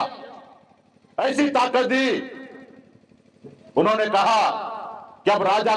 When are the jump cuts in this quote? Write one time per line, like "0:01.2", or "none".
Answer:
none